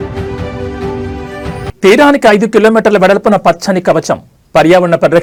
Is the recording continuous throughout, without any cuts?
yes; 0 cuts

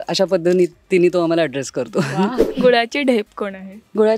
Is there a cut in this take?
yes; 1 cut; at 2.4 s

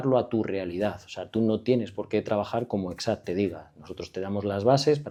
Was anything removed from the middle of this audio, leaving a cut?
no; 0 cuts

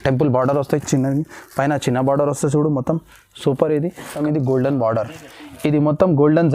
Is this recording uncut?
no; 1 cut; at 4.1 s

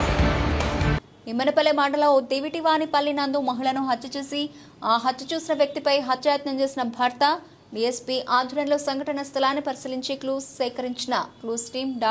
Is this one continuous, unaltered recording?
no; 1 cut; at 0.9 s

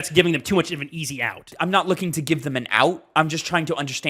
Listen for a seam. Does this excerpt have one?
yes; 1 cut; at 1.5 s

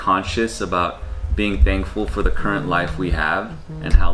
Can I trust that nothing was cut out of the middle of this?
yes; 0 cuts

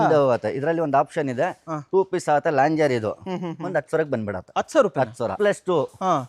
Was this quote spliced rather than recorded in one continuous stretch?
yes; 1 cut; at 5.4 s

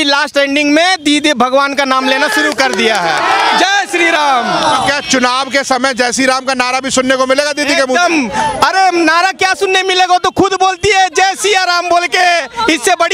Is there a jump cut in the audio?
no; 0 cuts

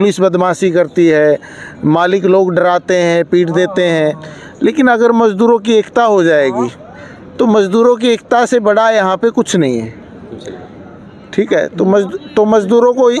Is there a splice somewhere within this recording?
no; 0 cuts

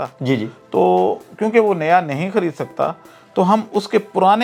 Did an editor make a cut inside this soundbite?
no; 0 cuts

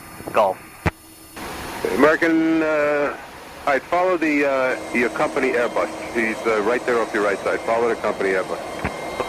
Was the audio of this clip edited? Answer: yes; 1 cut; at 7.6 s

